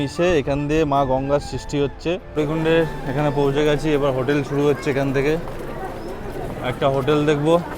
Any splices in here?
yes; 1 cut; at 2.2 s

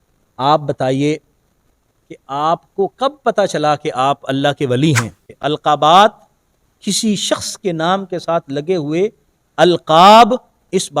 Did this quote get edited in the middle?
yes; 1 cut; at 5.3 s

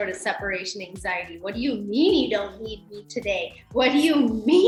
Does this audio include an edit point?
no; 0 cuts

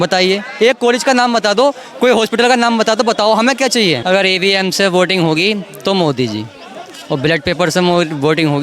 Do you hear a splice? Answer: yes; 1 cut; at 4.0 s

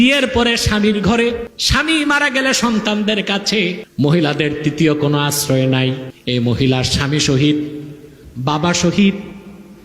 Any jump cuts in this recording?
yes; 3 cuts; at 1.5 s, 3.8 s, 6.1 s

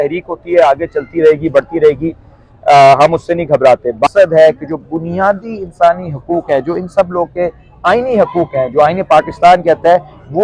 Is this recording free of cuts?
no; 1 cut; at 4.1 s

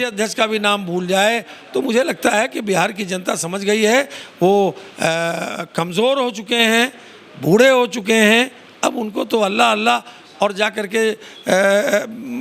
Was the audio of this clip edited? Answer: no; 0 cuts

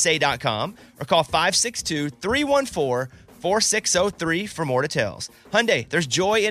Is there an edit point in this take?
no; 0 cuts

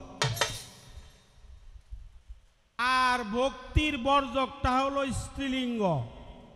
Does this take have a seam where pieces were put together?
yes; 1 cut; at 2.8 s

